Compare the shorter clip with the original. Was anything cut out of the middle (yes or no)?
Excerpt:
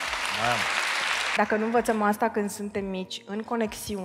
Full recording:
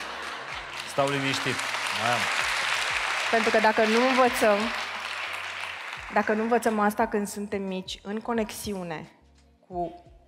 yes